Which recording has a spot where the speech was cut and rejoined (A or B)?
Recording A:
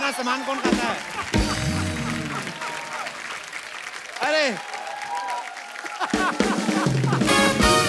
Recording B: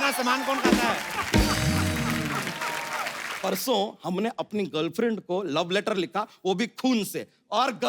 B